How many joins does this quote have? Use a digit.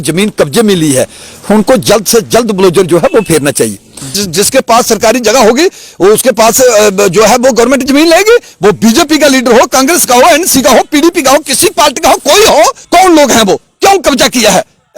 2